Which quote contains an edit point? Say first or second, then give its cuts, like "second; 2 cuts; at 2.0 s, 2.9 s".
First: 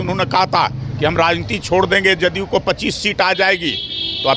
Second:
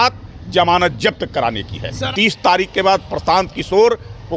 second; 1 cut; at 1.9 s